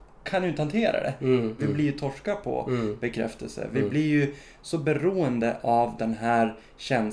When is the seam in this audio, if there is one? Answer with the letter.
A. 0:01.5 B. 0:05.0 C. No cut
A